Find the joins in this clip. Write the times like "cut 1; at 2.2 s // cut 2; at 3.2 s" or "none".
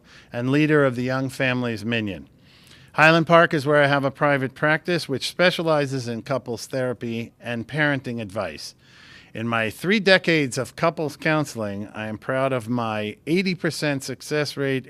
cut 1; at 4.5 s